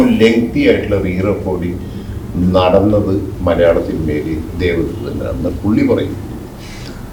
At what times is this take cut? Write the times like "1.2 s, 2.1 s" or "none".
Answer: none